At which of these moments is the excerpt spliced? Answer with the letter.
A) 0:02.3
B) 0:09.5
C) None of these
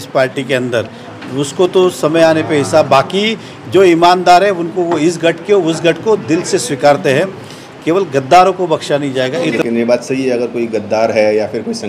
B